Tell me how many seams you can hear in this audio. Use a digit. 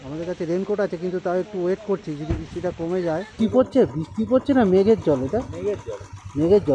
1